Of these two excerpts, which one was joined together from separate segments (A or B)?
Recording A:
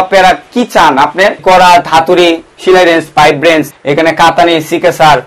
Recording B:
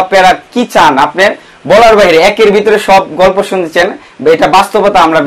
A